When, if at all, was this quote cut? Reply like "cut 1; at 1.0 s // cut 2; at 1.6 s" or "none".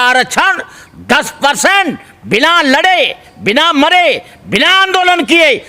none